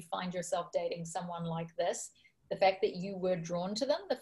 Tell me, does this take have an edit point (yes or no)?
no